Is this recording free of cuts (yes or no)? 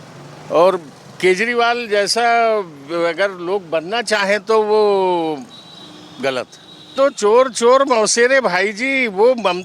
no